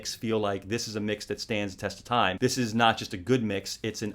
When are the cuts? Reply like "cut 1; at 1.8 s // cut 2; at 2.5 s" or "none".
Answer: none